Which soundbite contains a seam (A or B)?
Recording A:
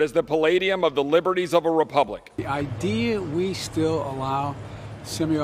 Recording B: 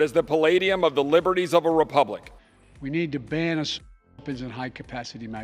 A